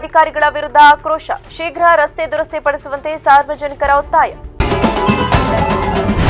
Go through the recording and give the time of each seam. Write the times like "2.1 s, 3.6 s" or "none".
4.5 s